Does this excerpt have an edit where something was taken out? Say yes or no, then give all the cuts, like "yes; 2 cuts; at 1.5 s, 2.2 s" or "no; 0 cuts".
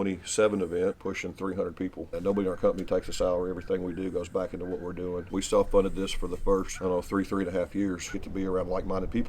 yes; 5 cuts; at 1.0 s, 2.1 s, 5.3 s, 6.7 s, 8.1 s